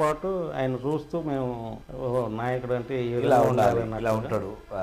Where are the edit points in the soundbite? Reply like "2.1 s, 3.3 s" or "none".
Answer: 1.8 s